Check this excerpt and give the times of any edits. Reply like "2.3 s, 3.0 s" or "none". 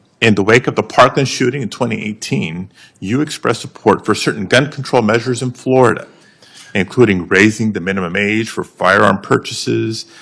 none